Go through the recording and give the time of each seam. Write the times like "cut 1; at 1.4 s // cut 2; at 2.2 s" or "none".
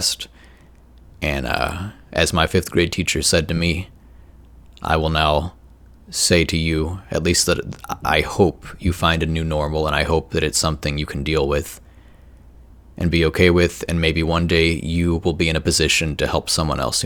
none